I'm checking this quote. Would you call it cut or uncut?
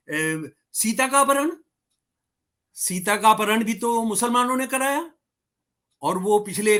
uncut